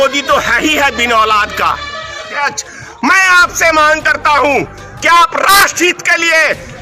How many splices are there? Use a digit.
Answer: 1